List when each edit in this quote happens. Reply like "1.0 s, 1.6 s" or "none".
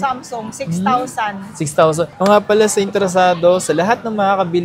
2.1 s

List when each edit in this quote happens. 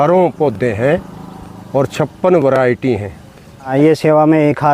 3.7 s

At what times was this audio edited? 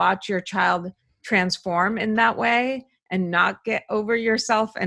none

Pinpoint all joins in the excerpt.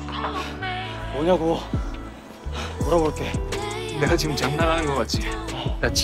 3.6 s

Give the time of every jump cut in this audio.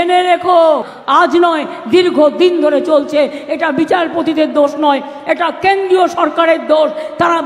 0.9 s

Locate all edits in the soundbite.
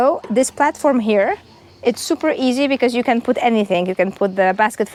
none

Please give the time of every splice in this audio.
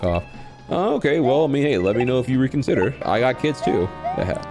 3.0 s

